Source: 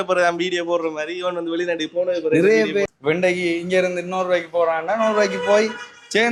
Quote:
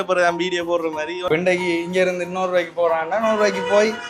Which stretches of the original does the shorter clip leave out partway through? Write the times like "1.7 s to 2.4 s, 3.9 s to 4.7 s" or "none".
1.2 s to 3.0 s

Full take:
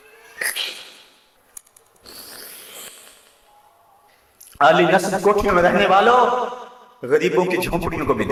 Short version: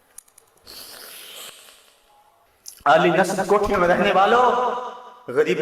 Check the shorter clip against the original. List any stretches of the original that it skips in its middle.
3.8 s to 4.2 s

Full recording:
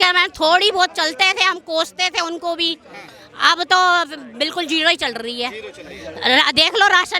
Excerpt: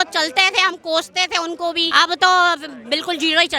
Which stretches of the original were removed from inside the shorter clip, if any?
2.7 s to 3.4 s

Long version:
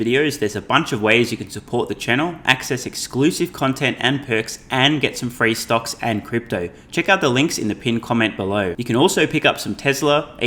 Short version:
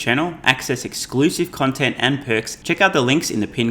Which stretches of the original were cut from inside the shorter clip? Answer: 4.6 s to 6.8 s

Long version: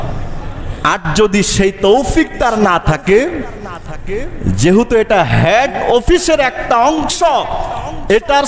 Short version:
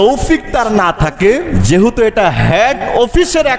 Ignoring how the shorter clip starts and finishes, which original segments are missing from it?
3.4 s to 4.5 s

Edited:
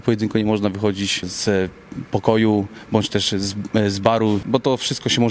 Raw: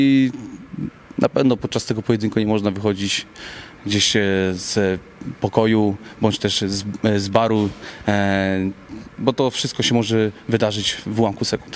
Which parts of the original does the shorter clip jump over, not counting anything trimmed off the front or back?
3.3 s to 4.6 s, 7.7 s to 9.2 s

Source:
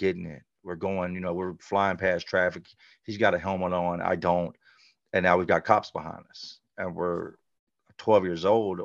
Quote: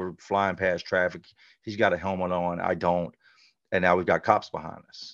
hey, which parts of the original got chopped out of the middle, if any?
none

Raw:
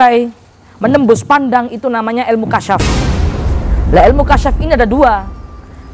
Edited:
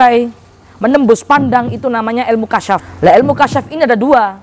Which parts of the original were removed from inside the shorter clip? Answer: 2.8 s to 3.8 s

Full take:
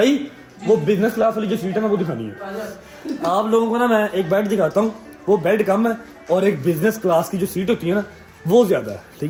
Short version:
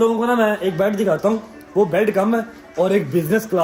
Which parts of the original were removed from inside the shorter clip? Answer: none

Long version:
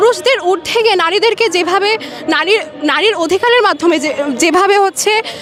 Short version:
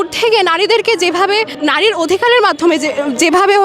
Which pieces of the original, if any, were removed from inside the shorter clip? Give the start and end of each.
2.0 s to 2.7 s

